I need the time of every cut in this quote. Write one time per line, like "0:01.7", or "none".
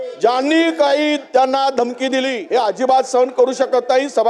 0:02.4